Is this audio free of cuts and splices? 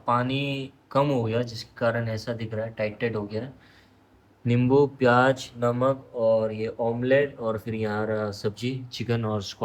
yes; 0 cuts

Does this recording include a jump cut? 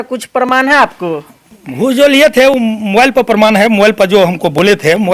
no; 0 cuts

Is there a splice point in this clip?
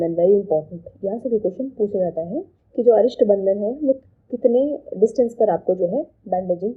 no; 0 cuts

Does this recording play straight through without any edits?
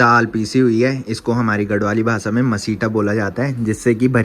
yes; 0 cuts

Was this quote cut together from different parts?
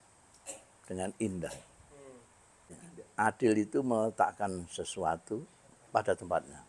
yes; 1 cut; at 2.9 s

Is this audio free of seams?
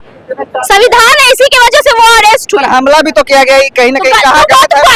yes; 0 cuts

